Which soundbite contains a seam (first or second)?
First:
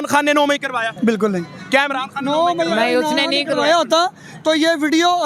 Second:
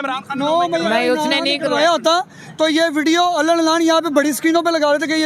first